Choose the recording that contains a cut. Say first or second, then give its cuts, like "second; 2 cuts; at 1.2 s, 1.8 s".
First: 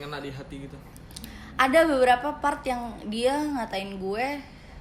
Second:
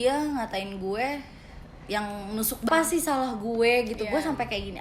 second; 1 cut; at 2.7 s